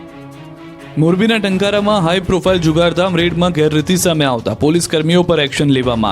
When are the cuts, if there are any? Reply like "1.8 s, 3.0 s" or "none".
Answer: 0.9 s